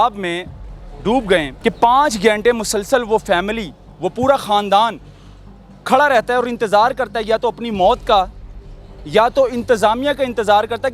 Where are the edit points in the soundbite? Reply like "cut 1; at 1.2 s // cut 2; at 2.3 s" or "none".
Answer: cut 1; at 1.5 s